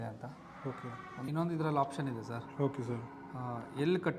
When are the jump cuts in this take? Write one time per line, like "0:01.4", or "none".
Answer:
0:01.3